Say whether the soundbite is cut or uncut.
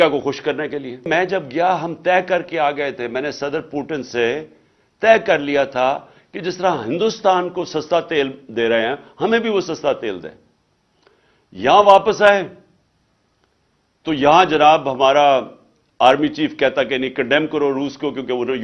cut